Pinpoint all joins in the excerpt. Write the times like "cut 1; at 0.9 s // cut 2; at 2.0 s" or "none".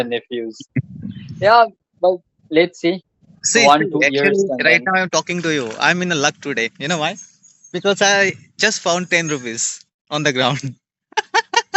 none